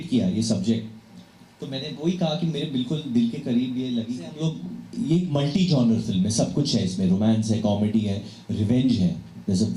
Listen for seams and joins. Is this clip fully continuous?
no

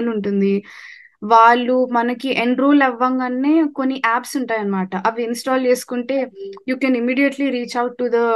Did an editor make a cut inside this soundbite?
no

